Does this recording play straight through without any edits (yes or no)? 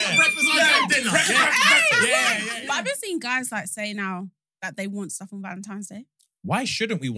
no